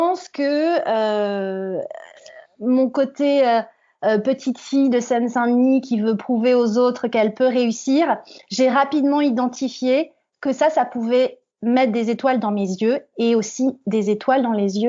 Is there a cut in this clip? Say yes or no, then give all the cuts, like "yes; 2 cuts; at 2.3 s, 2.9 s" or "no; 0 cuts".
no; 0 cuts